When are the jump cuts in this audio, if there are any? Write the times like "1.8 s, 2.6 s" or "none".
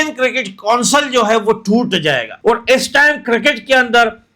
2.3 s